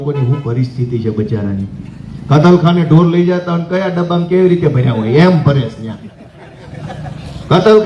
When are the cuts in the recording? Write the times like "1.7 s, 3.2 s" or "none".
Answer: none